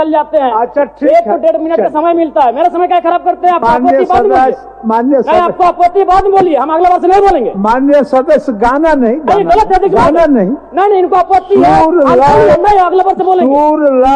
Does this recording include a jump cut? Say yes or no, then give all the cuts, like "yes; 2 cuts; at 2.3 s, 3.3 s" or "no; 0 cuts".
no; 0 cuts